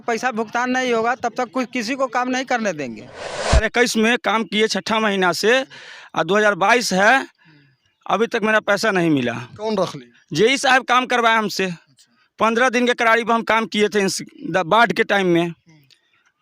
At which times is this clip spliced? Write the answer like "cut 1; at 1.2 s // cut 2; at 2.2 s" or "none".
cut 1; at 3.6 s

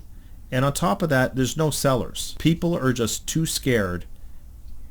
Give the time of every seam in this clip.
cut 1; at 2.3 s

